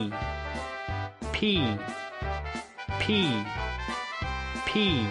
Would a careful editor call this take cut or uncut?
uncut